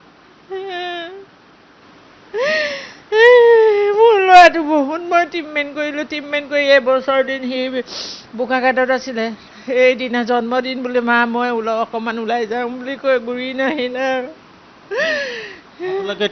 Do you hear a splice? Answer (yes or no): no